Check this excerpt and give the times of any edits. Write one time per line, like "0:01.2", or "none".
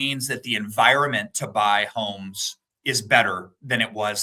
none